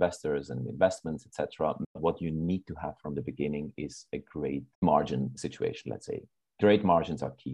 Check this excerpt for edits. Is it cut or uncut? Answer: cut